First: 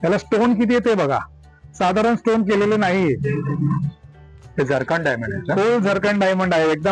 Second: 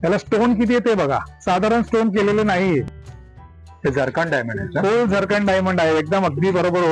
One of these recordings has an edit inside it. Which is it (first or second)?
second